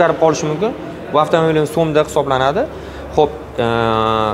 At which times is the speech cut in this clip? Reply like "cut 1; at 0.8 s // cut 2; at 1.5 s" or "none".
none